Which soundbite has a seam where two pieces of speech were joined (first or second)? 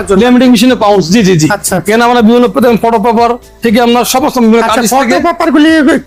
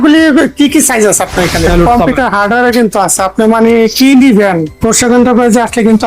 second